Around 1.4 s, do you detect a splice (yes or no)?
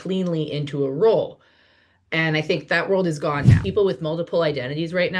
no